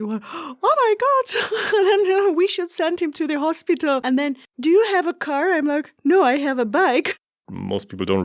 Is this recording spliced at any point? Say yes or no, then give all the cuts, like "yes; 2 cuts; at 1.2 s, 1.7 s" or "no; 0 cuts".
yes; 2 cuts; at 4.4 s, 7.3 s